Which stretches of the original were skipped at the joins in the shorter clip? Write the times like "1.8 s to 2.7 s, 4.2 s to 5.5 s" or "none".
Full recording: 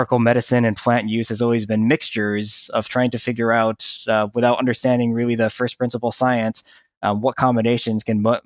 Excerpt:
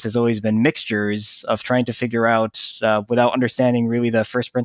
none